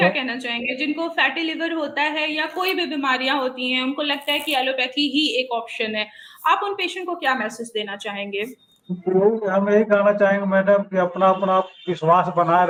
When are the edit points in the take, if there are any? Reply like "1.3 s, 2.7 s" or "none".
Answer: none